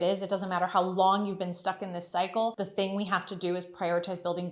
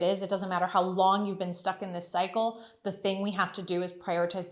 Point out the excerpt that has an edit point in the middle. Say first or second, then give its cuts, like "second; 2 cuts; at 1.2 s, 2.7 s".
first; 1 cut; at 2.5 s